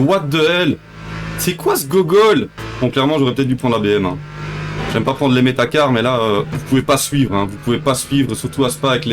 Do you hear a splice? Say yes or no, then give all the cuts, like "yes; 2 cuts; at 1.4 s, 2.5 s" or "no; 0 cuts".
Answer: yes; 2 cuts; at 2.6 s, 6.6 s